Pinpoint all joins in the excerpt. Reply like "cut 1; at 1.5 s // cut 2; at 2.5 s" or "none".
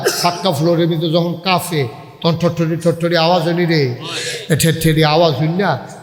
none